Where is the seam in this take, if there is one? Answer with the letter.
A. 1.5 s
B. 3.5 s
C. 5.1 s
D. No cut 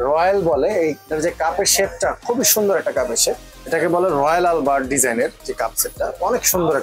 B